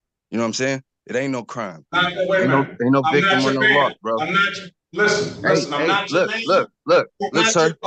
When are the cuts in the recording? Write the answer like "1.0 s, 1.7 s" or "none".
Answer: none